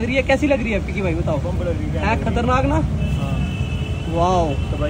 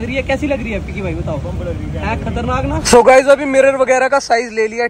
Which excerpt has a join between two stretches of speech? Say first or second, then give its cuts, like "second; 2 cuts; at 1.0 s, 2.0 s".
second; 1 cut; at 2.8 s